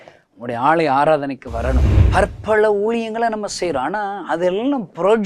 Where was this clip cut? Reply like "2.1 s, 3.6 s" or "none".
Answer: 1.9 s